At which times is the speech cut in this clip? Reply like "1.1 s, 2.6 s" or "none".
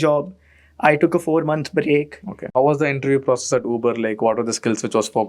2.5 s